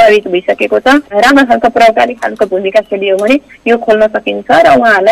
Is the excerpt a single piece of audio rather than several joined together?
no; 1 cut; at 1.1 s

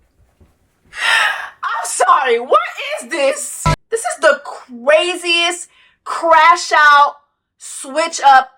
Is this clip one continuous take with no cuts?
no; 1 cut; at 3.5 s

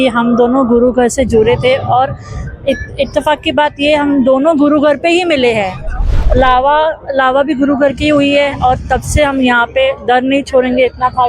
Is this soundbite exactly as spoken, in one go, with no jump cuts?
no; 1 cut; at 6.1 s

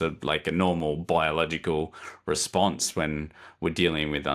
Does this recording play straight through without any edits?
yes; 0 cuts

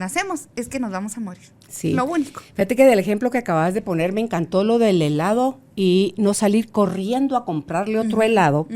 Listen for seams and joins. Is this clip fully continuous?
yes; 0 cuts

